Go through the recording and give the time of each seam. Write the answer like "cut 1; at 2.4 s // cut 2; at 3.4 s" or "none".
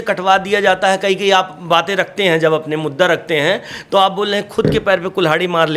none

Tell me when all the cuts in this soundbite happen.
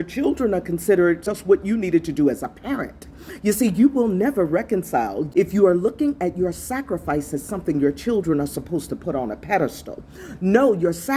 cut 1; at 1.3 s // cut 2; at 5.2 s

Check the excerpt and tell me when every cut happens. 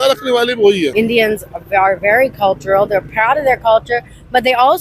cut 1; at 0.9 s

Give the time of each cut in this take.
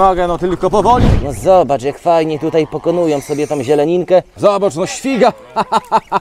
cut 1; at 1.1 s // cut 2; at 4.3 s

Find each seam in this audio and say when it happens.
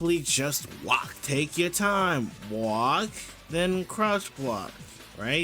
cut 1; at 1.1 s

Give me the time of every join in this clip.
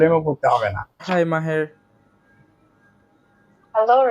cut 1; at 1.0 s

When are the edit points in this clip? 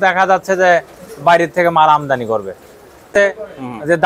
cut 1; at 3.1 s

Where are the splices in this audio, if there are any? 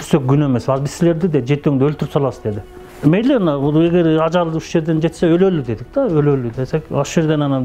none

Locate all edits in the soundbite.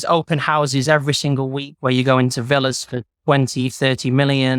none

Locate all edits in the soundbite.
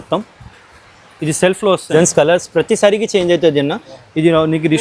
cut 1; at 1.9 s

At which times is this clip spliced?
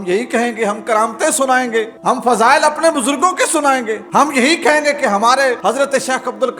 cut 1; at 1.9 s // cut 2; at 4.0 s // cut 3; at 5.6 s

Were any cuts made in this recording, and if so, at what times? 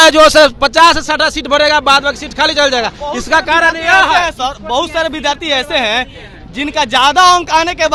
none

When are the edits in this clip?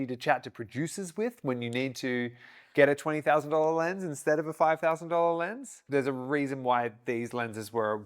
cut 1; at 5.8 s

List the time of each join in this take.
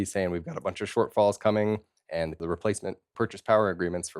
cut 1; at 0.9 s // cut 2; at 2.5 s

